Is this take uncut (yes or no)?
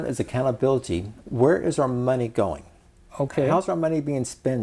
no